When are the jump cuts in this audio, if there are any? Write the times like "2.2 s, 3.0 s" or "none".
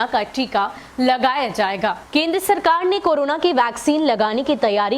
2.0 s